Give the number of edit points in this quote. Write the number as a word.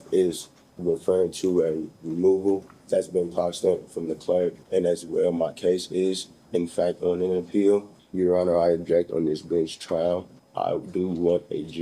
four